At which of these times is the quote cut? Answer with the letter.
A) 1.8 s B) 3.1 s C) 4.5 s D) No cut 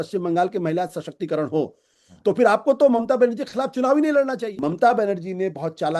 C